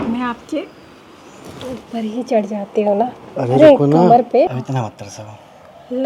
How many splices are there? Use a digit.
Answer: 1